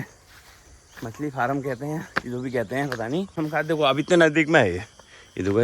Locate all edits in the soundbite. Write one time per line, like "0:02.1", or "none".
0:03.3